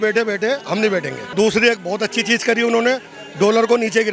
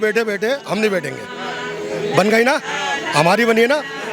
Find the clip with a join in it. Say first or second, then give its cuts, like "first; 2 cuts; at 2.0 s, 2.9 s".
first; 1 cut; at 1.3 s